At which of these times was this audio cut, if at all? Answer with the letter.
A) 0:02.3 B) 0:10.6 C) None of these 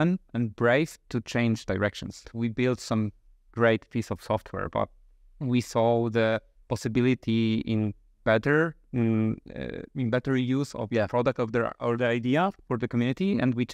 A